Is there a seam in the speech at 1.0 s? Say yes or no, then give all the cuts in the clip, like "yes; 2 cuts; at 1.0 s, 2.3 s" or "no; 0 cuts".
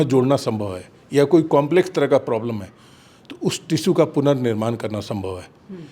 no; 0 cuts